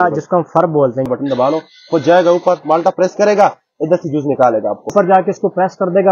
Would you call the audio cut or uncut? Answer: cut